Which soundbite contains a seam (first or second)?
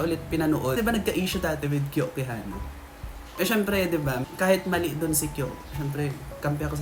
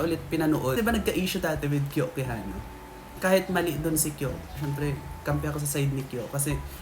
second